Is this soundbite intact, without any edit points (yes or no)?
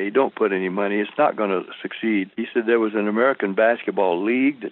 no